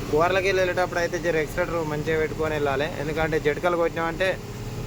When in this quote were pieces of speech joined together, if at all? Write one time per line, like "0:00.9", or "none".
none